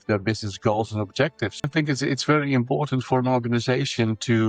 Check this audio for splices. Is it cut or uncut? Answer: cut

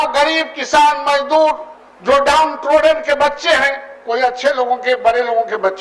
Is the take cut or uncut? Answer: uncut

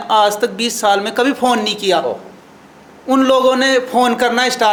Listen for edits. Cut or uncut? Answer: uncut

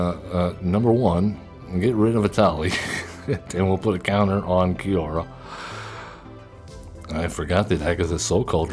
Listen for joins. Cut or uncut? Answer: cut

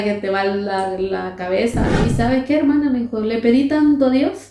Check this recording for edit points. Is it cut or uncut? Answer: cut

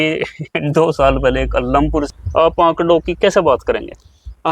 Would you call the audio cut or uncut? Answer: cut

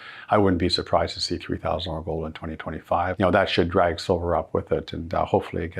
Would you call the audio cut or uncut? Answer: cut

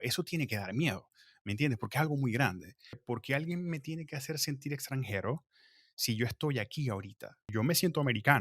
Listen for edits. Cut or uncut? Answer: cut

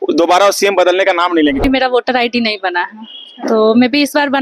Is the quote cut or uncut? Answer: cut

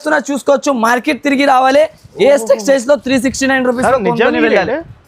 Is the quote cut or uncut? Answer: uncut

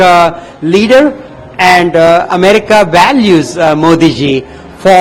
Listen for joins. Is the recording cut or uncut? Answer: uncut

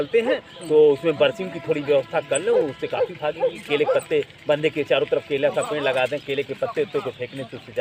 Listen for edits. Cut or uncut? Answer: uncut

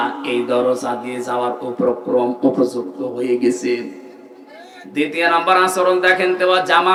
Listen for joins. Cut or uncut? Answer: uncut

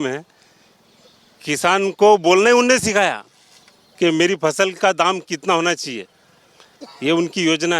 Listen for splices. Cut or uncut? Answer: uncut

